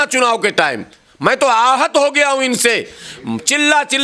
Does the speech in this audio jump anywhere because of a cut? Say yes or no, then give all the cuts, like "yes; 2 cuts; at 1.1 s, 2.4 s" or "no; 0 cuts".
no; 0 cuts